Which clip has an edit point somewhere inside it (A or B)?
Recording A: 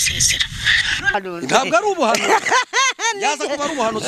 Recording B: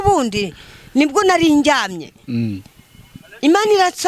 A